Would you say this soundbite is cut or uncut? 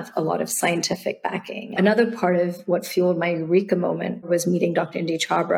cut